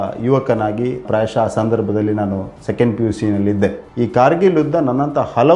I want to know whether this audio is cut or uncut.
uncut